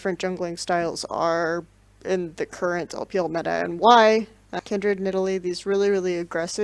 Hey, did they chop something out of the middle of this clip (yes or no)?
no